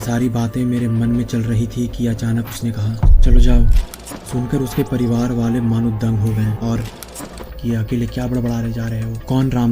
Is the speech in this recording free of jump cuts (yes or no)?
no